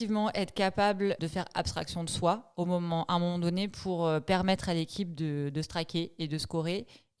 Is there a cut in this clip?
yes; 1 cut; at 1.2 s

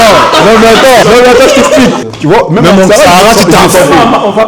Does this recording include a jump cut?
yes; 2 cuts; at 1.0 s, 2.0 s

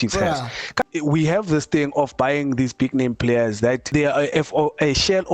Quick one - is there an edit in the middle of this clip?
yes; 2 cuts; at 0.8 s, 3.9 s

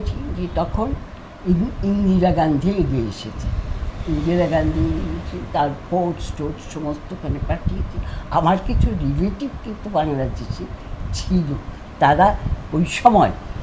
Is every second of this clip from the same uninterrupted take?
yes; 0 cuts

